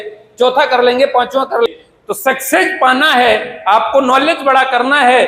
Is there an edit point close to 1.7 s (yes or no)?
yes